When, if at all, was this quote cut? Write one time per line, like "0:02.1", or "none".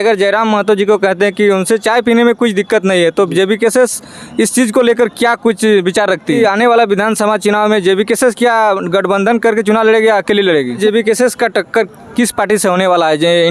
0:06.4
0:10.8